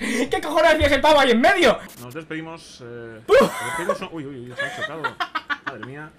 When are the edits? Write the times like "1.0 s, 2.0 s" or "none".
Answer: none